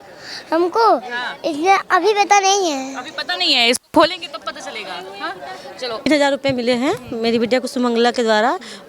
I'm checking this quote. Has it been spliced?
no; 0 cuts

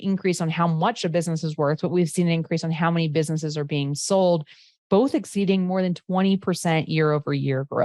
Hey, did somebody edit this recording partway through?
no; 0 cuts

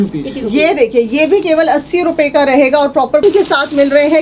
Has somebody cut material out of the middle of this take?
yes; 1 cut; at 3.2 s

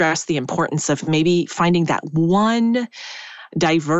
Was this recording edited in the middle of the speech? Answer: no; 0 cuts

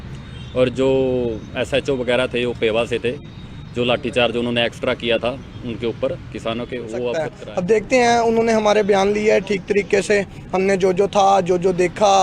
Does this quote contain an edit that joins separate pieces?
yes; 1 cut; at 7.4 s

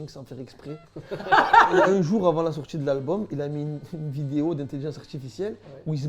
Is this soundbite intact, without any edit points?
no; 1 cut; at 1.7 s

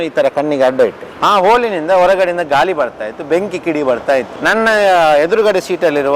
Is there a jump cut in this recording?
yes; 1 cut; at 1.1 s

